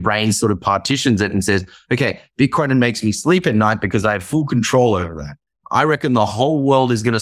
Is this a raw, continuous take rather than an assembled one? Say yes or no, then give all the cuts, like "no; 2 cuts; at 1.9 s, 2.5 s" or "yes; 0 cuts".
no; 1 cut; at 5.5 s